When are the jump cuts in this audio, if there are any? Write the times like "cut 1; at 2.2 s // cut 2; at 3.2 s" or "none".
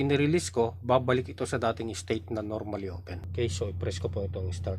cut 1; at 3.1 s

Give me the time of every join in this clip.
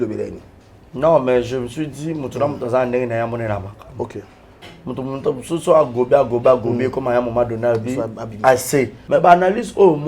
cut 1; at 9.0 s

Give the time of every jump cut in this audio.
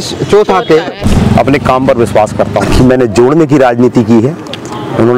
cut 1; at 1.0 s // cut 2; at 2.7 s

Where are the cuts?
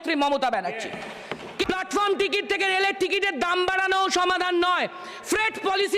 cut 1; at 1.6 s

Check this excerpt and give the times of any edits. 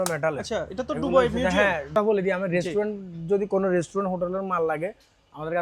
cut 1; at 1.9 s

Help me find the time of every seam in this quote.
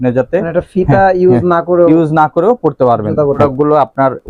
cut 1; at 3.4 s

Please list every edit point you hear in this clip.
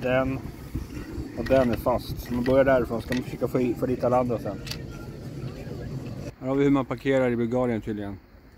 cut 1; at 6.3 s

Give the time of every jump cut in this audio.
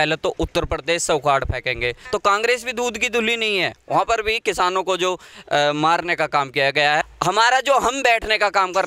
cut 1; at 2.0 s // cut 2; at 7.1 s

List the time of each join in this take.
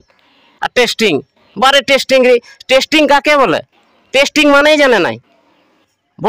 none

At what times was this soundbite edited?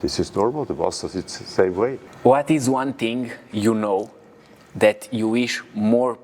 cut 1; at 2.1 s

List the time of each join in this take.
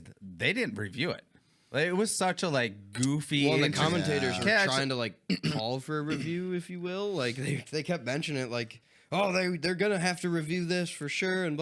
none

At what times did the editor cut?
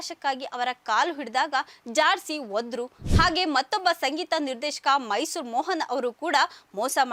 none

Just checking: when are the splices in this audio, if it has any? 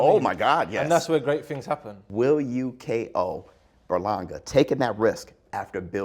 cut 1; at 2.0 s

